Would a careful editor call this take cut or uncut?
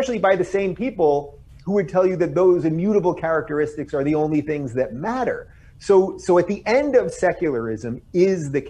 uncut